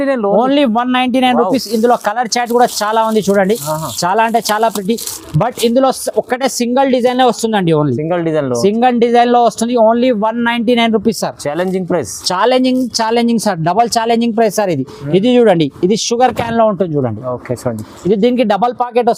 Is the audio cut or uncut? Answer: uncut